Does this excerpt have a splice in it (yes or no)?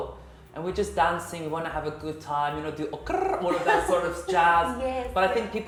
no